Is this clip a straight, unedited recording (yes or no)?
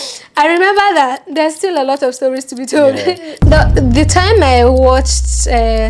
no